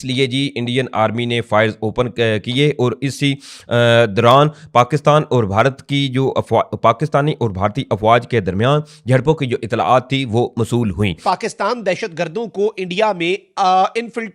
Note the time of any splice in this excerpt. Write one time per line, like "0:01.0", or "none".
0:11.2